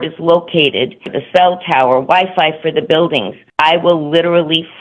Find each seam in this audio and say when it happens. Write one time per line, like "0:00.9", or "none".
0:01.1
0:03.4